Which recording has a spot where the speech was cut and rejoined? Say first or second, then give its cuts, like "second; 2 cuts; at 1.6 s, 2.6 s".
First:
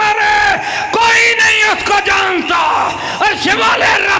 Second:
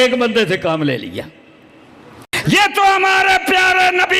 second; 1 cut; at 2.3 s